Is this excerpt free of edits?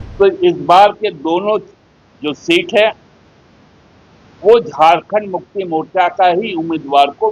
yes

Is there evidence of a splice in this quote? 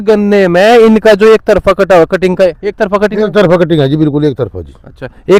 no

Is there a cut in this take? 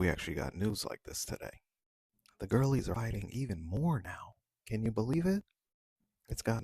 yes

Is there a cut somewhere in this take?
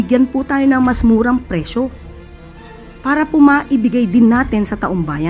no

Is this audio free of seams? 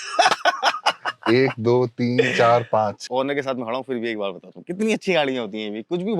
no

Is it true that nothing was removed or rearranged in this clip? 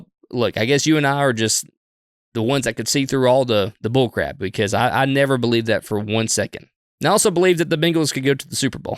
no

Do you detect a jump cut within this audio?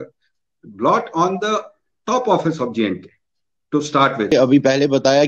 yes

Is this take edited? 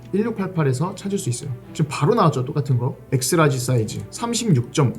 yes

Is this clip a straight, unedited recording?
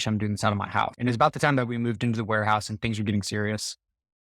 no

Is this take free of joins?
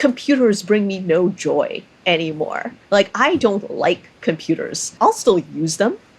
no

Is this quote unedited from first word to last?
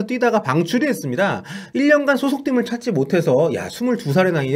yes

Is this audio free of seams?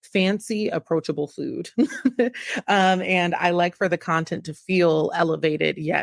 yes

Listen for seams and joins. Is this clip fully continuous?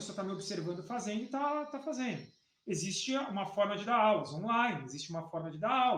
yes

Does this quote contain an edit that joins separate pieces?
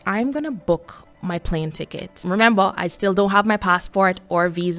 yes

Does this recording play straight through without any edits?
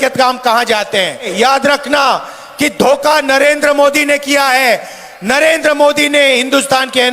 no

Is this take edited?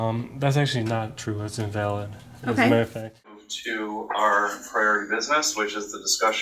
yes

